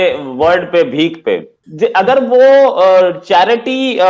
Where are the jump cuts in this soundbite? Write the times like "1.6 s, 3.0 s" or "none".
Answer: 1.6 s